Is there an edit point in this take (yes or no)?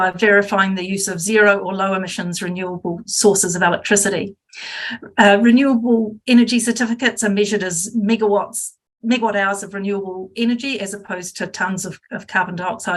no